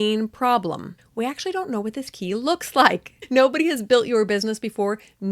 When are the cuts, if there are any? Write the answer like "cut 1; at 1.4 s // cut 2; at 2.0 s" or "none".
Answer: cut 1; at 1.0 s // cut 2; at 3.1 s